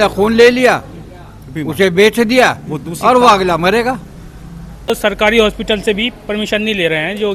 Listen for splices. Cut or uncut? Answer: cut